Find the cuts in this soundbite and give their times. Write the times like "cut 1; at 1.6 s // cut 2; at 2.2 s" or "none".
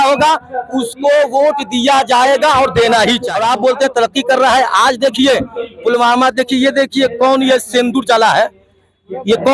cut 1; at 3.3 s

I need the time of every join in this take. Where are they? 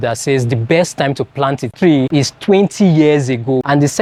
none

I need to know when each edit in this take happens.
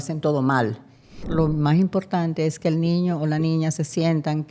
cut 1; at 1.3 s

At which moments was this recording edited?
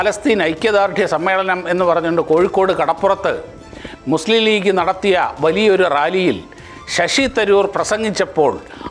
none

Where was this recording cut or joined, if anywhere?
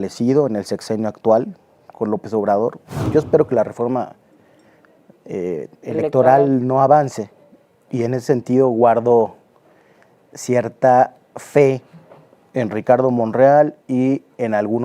cut 1; at 3.1 s

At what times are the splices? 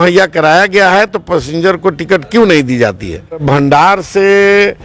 cut 1; at 3.4 s

